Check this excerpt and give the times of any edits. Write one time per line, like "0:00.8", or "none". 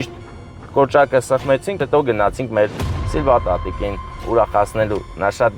0:01.8